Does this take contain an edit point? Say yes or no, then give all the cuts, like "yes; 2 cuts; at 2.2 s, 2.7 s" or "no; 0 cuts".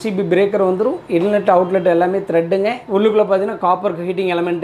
yes; 1 cut; at 2.8 s